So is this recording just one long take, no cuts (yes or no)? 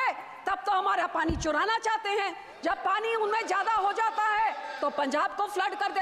yes